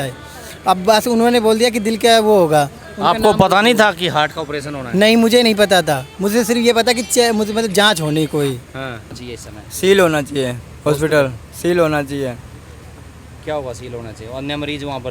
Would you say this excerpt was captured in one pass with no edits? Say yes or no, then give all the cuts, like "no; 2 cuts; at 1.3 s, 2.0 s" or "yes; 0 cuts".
no; 1 cut; at 9.2 s